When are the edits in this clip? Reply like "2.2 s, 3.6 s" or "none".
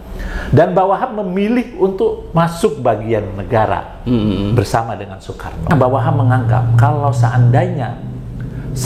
5.7 s